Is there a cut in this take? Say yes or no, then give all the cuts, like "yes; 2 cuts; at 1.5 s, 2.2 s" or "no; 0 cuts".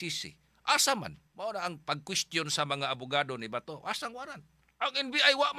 yes; 2 cuts; at 1.2 s, 4.7 s